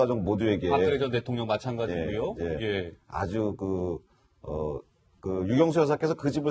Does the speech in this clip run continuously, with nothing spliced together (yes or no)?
no